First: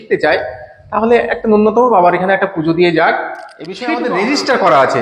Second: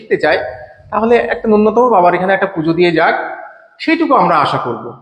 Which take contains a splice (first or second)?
first